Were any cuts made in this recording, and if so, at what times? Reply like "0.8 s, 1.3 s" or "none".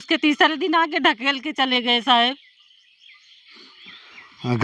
none